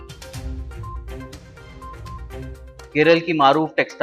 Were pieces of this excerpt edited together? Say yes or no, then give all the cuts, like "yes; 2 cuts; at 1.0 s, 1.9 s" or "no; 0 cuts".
no; 0 cuts